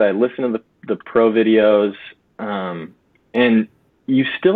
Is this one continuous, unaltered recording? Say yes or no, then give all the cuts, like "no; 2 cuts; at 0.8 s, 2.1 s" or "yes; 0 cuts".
yes; 0 cuts